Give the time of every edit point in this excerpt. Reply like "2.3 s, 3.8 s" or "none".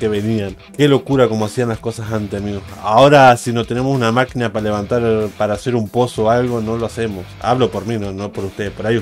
none